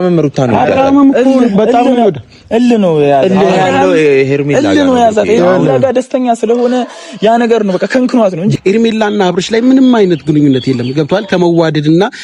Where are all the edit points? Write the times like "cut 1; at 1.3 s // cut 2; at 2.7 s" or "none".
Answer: cut 1; at 8.5 s